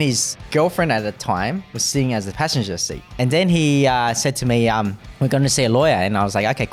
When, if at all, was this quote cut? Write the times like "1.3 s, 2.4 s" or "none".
none